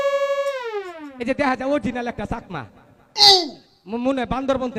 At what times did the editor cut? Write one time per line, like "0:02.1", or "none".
none